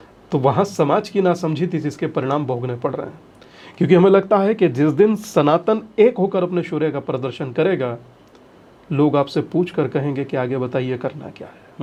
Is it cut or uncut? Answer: uncut